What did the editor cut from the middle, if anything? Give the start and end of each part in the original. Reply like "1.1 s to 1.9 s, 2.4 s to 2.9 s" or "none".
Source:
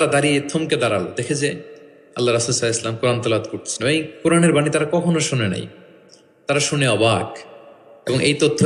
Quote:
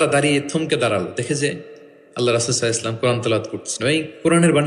none